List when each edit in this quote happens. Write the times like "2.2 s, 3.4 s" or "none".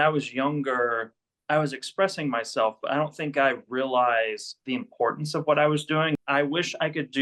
6.1 s